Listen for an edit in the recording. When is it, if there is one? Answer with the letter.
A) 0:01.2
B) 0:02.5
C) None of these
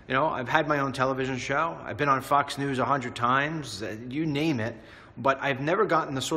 B